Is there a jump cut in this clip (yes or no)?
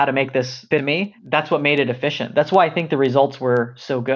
yes